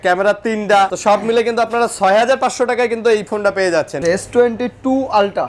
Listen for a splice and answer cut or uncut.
cut